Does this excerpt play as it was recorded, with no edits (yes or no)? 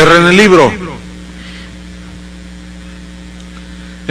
no